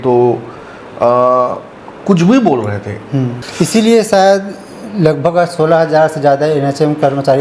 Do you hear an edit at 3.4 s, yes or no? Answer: yes